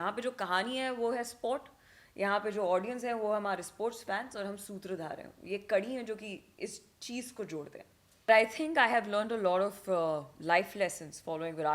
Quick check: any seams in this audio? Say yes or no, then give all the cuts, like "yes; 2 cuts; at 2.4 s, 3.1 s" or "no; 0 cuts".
yes; 1 cut; at 8.3 s